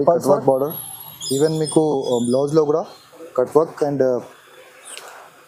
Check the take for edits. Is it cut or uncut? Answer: uncut